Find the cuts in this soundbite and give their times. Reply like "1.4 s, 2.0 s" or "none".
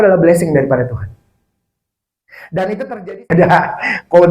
3.3 s